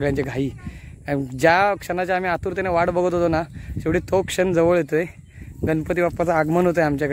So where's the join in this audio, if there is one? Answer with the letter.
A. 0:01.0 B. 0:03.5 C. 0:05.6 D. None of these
D